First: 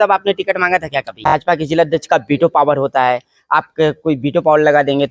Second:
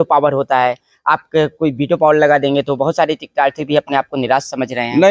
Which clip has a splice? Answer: first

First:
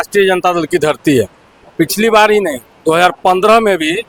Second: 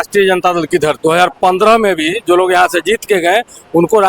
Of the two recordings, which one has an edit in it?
second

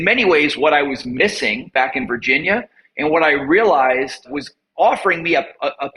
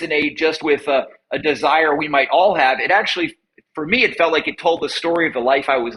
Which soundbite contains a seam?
first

